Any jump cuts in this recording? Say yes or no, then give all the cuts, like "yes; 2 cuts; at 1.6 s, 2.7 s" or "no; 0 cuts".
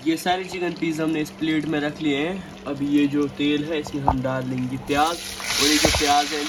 no; 0 cuts